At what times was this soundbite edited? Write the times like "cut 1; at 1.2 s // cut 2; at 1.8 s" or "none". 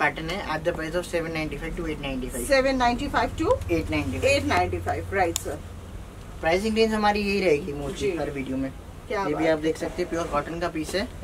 none